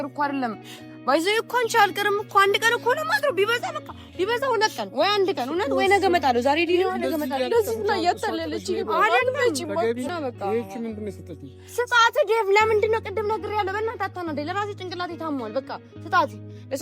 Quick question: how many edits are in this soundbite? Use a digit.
1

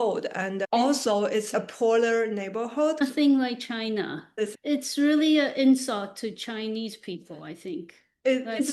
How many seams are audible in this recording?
2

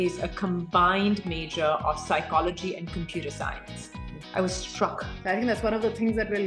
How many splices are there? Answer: 1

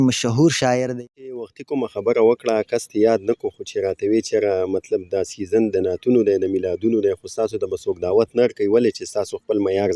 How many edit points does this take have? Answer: 1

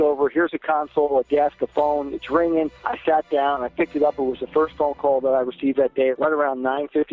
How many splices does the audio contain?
2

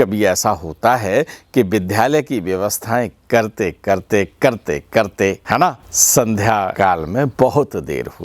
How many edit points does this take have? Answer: 2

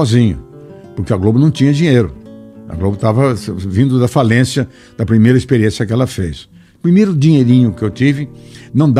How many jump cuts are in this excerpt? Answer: 1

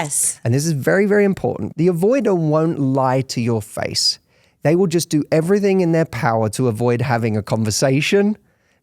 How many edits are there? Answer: 1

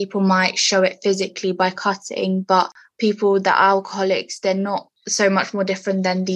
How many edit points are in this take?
0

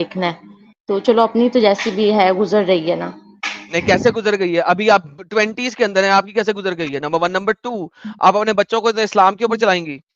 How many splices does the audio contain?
0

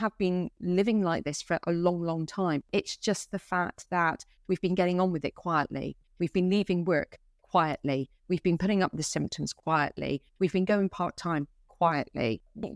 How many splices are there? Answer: 0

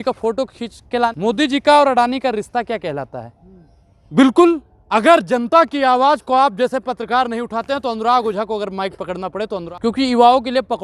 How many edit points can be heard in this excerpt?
3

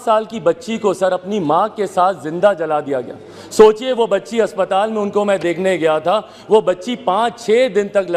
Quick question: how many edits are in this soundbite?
0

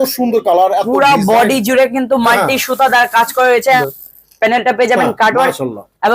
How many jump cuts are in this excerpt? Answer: 1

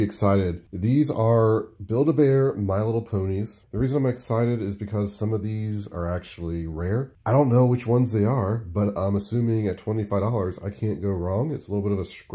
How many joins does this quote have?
2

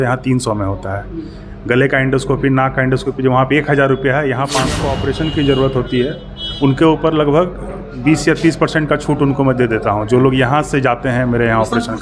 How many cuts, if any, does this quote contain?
1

